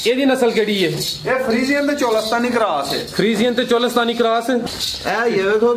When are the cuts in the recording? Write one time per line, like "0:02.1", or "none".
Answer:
0:04.6